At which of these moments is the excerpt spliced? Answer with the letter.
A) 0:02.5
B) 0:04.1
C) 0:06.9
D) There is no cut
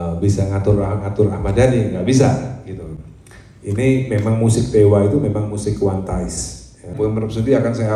C